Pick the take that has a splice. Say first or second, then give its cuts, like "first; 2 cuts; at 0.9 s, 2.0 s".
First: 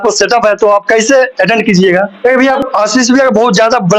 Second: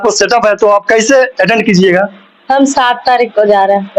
first; 1 cut; at 2.1 s